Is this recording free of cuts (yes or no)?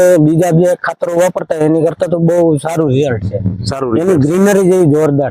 yes